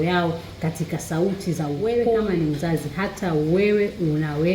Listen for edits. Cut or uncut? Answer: cut